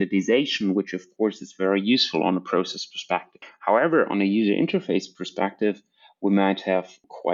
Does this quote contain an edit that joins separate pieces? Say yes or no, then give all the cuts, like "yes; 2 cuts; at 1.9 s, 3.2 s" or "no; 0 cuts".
no; 0 cuts